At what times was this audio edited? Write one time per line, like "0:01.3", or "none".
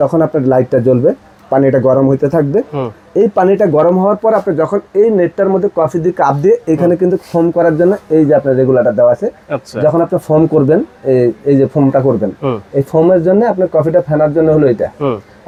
none